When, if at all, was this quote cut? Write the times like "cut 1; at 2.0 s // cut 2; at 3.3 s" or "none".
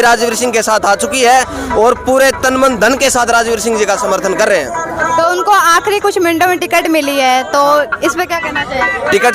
none